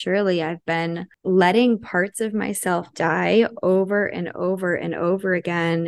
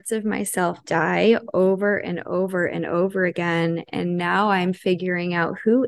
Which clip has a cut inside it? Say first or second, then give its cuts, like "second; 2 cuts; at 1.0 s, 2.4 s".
first; 1 cut; at 1.1 s